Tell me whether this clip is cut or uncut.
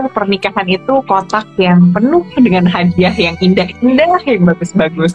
uncut